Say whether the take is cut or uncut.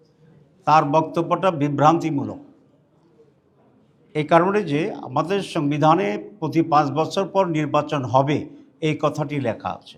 uncut